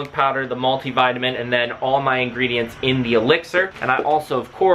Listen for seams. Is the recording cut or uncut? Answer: cut